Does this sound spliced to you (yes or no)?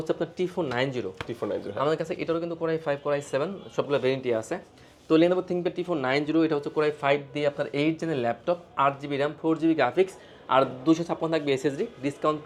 no